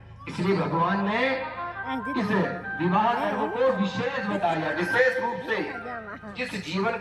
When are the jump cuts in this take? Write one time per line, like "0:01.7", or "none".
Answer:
none